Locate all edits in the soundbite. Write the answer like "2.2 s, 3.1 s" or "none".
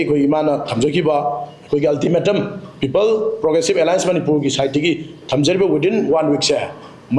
none